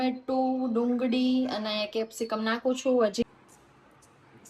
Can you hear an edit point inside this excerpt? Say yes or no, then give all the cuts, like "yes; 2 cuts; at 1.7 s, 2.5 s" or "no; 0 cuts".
yes; 1 cut; at 3.3 s